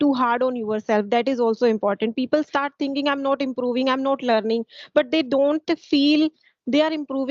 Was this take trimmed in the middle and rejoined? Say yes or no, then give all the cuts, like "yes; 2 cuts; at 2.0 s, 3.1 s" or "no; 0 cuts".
no; 0 cuts